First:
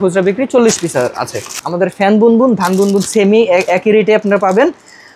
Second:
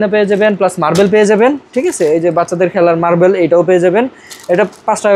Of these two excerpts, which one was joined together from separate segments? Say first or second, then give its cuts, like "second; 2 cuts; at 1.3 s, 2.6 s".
first; 1 cut; at 1.6 s